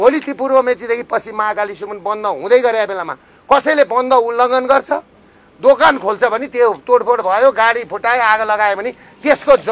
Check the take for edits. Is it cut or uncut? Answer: uncut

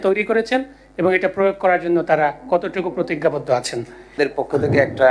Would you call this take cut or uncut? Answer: cut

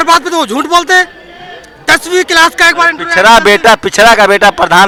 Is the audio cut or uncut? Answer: uncut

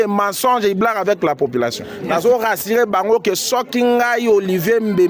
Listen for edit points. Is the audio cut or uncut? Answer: cut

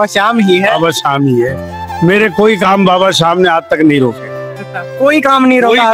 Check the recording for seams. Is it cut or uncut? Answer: uncut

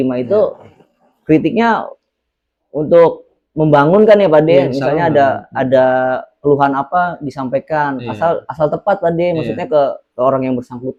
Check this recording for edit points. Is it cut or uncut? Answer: uncut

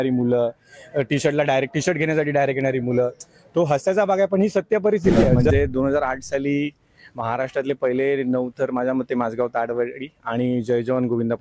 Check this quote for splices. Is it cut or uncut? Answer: cut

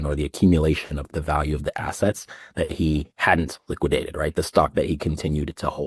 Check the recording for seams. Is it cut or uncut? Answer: cut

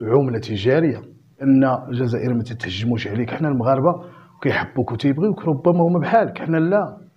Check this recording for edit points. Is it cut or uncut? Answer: cut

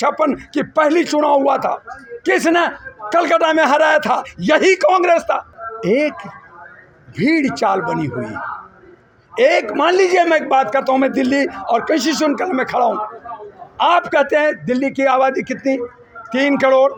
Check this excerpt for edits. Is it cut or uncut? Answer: uncut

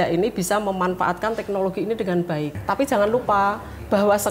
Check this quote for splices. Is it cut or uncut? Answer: cut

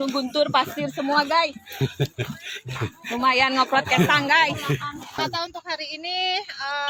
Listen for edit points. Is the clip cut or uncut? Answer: uncut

